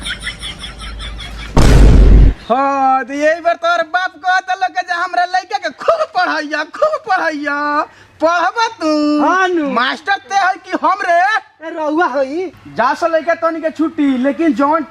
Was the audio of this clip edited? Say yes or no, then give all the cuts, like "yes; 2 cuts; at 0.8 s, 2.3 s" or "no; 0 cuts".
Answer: no; 0 cuts